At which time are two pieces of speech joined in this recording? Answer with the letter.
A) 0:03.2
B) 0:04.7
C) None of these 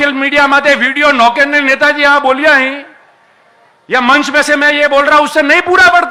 C